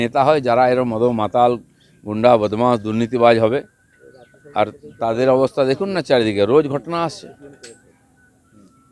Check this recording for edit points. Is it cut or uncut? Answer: uncut